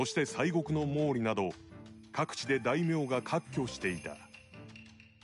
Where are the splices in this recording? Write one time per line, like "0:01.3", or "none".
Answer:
0:04.3